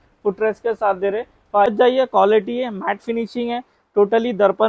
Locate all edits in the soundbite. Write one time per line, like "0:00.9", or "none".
0:01.7